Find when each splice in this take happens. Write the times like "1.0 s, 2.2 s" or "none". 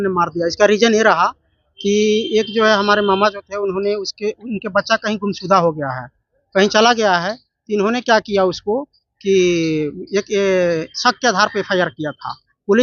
none